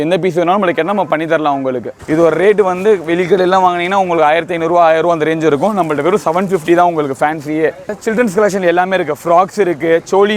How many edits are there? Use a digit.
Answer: 2